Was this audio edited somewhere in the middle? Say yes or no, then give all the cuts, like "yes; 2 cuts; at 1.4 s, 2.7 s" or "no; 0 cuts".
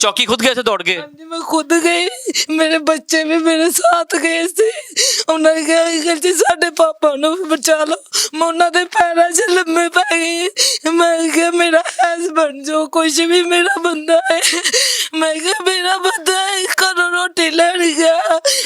no; 0 cuts